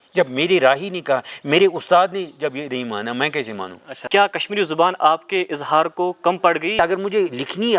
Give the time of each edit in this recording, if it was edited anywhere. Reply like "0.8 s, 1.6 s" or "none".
3.9 s, 6.8 s